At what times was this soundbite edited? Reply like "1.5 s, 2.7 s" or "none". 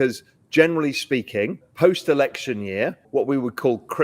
1.6 s, 3.0 s